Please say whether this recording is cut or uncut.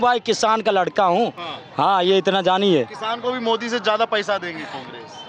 uncut